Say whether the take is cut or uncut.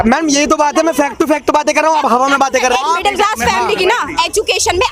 cut